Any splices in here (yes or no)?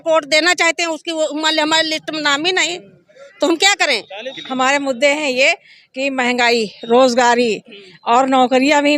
yes